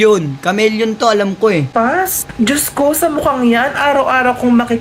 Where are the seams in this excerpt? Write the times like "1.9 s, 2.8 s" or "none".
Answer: none